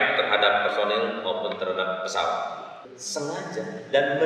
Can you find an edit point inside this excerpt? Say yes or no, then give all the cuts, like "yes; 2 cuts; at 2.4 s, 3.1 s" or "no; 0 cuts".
yes; 1 cut; at 2.7 s